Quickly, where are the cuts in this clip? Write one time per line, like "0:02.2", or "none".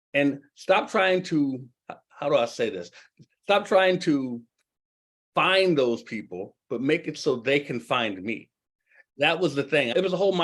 0:09.2